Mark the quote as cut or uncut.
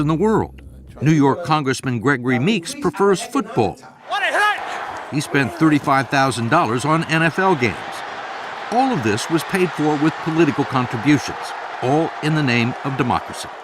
cut